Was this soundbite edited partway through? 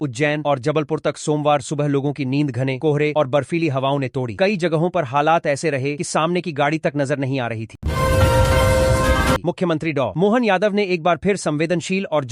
yes; 2 cuts; at 7.7 s, 9.4 s

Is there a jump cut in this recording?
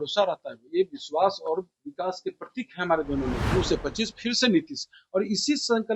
yes; 1 cut; at 3.4 s

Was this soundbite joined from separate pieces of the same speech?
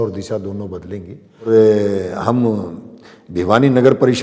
yes; 1 cut; at 1.5 s

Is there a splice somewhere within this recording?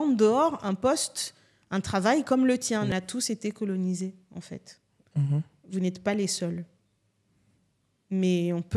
yes; 1 cut; at 2.9 s

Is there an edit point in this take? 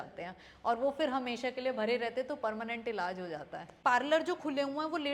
yes; 1 cut; at 3.7 s

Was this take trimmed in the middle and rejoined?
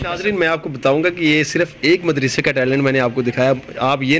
no; 0 cuts

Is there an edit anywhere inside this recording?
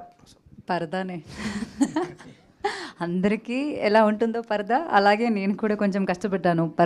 no; 0 cuts

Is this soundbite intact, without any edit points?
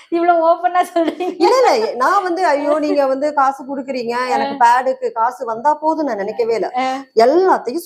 yes; 0 cuts

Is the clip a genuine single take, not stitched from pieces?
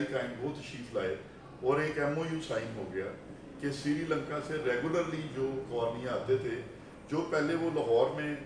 yes; 0 cuts

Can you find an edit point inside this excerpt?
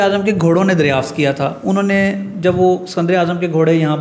no; 0 cuts

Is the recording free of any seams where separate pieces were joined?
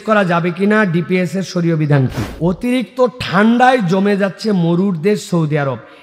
no; 1 cut; at 2.4 s

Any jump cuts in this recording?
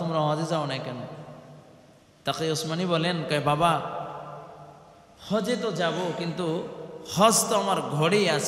no; 0 cuts

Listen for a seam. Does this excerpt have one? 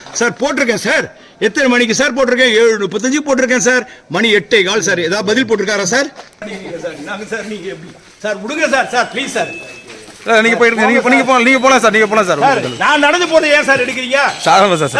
yes; 1 cut; at 6.5 s

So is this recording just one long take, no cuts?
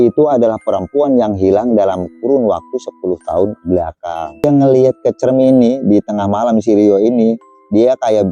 no; 1 cut; at 4.4 s

